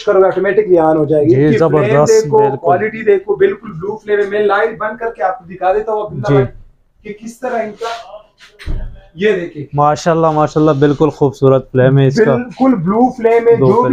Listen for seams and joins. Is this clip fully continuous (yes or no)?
yes